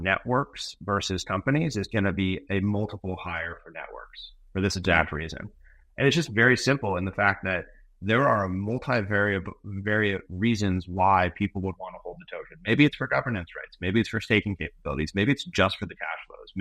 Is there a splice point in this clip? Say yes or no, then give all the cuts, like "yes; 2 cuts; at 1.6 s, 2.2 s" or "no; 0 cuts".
no; 0 cuts